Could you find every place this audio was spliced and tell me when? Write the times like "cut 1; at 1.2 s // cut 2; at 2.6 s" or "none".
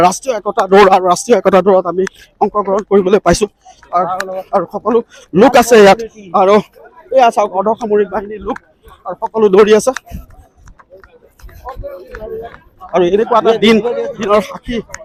none